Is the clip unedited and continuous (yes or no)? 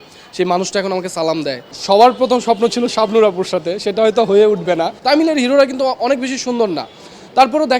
no